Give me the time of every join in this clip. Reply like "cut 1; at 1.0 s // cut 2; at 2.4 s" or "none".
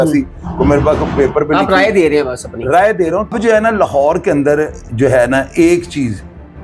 cut 1; at 3.3 s